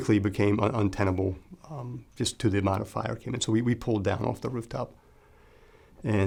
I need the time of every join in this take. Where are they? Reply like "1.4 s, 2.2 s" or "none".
none